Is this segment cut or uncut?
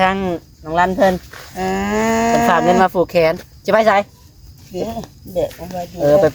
uncut